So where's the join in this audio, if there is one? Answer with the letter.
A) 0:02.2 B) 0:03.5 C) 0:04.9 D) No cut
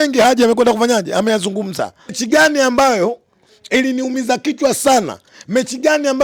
A